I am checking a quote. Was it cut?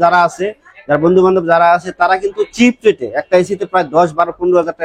no; 0 cuts

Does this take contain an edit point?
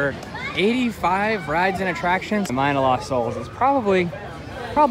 yes; 1 cut; at 2.5 s

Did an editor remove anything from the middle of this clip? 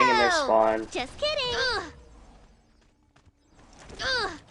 no; 0 cuts

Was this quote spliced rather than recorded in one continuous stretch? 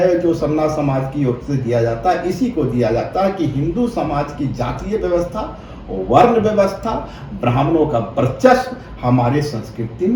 no; 0 cuts

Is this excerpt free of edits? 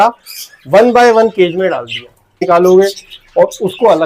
no; 1 cut; at 2.4 s

